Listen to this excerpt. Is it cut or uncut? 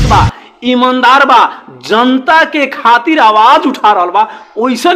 uncut